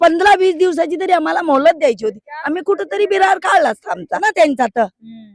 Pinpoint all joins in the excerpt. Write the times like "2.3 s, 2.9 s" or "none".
4.2 s